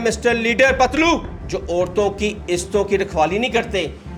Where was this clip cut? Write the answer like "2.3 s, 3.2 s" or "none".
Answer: 1.4 s